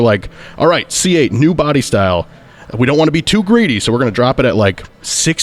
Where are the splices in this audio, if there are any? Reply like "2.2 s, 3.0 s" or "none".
none

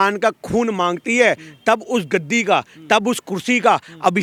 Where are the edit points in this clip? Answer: none

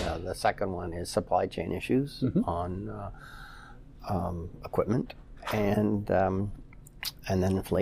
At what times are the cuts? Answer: none

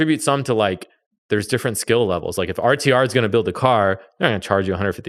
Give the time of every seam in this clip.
none

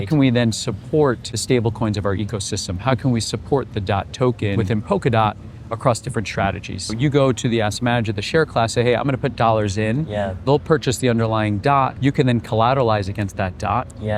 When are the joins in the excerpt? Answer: 1.3 s, 4.6 s, 6.9 s, 11.9 s

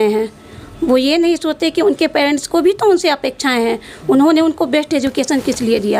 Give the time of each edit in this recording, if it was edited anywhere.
none

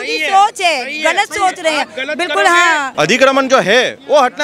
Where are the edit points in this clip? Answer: 2.9 s

